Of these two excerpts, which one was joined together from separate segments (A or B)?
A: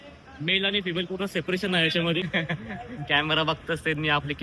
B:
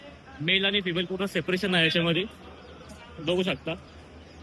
A